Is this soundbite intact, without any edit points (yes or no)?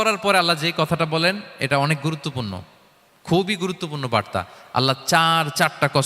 no